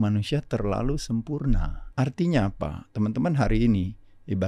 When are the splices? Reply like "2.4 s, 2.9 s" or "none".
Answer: 1.8 s